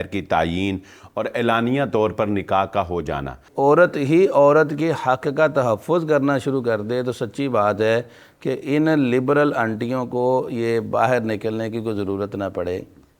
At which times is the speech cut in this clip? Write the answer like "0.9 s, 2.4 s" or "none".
3.5 s